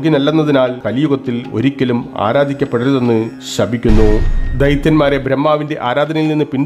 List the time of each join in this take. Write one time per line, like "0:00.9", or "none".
0:04.4